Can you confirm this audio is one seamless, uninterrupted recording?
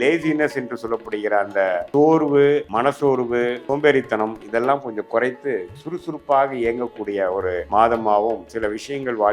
no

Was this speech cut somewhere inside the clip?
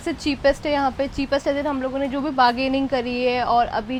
no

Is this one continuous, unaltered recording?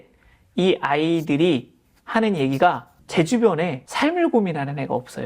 no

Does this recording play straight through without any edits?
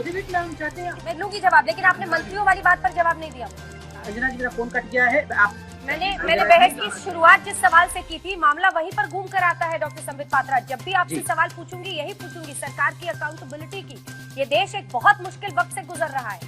no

